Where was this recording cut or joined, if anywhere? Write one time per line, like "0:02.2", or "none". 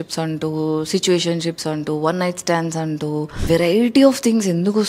0:03.4